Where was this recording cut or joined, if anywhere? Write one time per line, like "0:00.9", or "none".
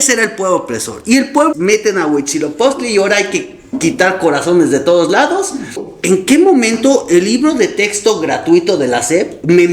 0:01.5
0:05.8